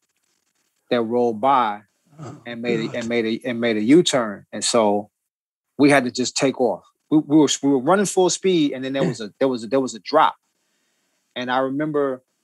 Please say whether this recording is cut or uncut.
cut